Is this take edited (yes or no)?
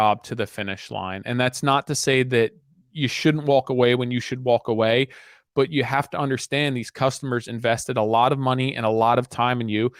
no